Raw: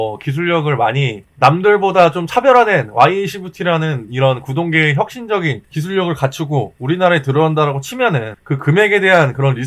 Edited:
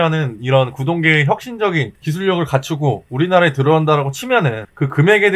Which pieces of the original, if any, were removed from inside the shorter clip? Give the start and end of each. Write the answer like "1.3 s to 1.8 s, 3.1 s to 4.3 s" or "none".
none